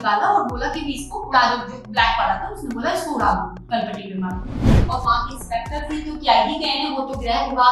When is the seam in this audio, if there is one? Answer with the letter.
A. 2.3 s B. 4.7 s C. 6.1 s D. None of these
B